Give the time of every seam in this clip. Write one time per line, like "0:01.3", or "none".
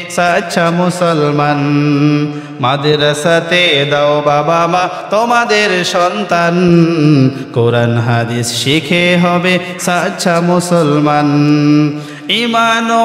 none